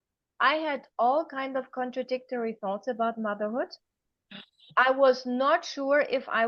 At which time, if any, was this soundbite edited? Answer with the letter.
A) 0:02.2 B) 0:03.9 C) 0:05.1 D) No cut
D